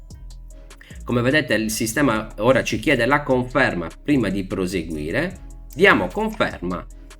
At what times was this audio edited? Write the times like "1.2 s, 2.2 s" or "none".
1.1 s